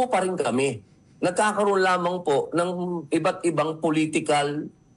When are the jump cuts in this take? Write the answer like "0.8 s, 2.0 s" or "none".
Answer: 1.6 s